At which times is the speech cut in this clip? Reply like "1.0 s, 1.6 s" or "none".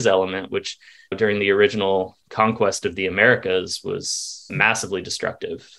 4.5 s

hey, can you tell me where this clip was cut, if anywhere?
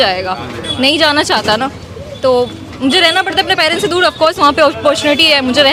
none

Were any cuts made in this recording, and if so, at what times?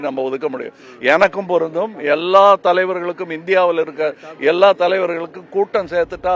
none

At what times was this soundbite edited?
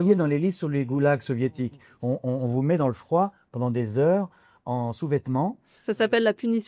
none

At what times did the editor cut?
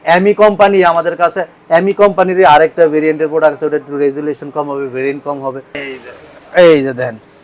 5.8 s

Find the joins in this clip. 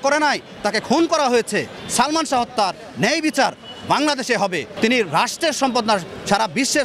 1.8 s, 4.7 s

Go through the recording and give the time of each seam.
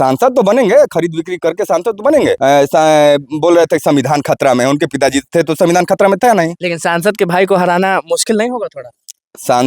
2.4 s

